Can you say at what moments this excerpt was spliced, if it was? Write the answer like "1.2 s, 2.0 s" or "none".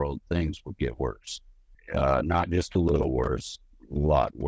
1.7 s